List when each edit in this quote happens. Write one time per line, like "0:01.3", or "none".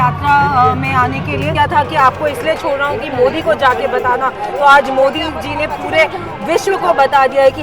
0:01.5

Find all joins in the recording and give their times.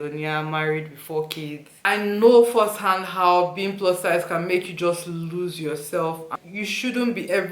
0:01.9
0:06.3

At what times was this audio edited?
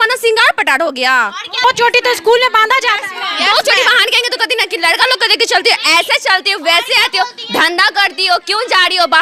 none

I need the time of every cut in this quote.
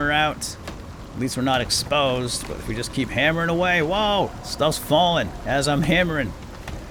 none

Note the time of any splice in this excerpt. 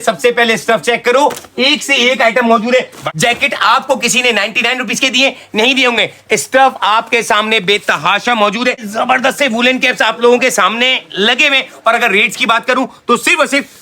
0:03.0
0:08.9

